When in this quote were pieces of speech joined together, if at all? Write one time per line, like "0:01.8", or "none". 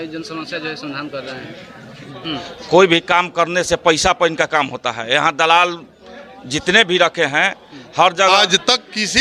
0:02.1
0:08.3